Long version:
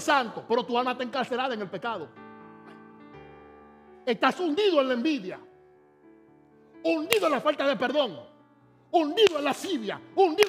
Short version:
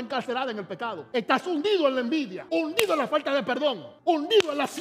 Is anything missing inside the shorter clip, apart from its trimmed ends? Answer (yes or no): yes